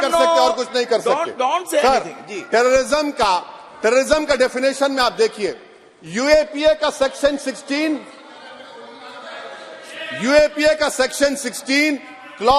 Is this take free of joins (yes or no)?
yes